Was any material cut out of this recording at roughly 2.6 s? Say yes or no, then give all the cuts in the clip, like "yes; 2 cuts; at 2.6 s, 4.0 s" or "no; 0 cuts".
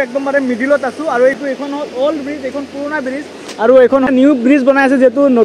no; 2 cuts; at 1.4 s, 4.0 s